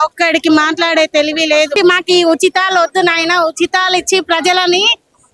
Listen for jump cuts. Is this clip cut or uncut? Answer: cut